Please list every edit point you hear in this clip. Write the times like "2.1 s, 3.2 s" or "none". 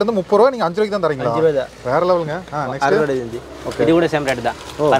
none